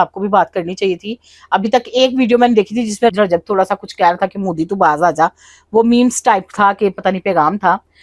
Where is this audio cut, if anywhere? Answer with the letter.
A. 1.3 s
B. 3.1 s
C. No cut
B